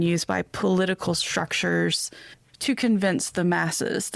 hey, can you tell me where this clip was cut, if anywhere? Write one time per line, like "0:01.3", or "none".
none

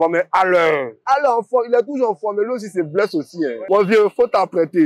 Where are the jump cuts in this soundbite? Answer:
none

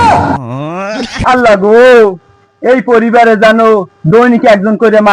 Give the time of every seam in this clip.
0:01.1

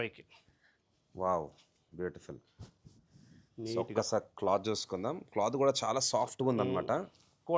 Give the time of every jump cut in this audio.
none

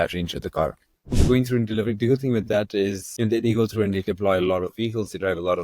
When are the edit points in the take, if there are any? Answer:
0:01.2
0:03.0

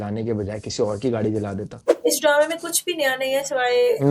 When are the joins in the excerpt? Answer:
0:01.8

